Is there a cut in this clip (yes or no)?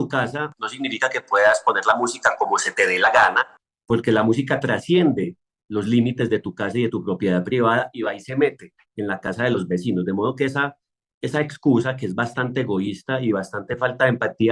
no